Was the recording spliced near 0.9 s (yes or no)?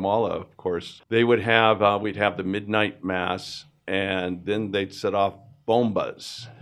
yes